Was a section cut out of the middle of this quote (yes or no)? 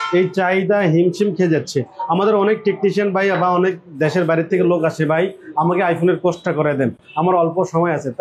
no